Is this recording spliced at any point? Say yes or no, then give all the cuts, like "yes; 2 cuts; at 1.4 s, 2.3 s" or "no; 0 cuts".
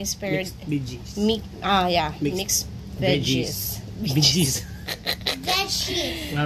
no; 0 cuts